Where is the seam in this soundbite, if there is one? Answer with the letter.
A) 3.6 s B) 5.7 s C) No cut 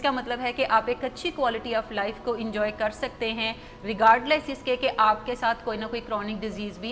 C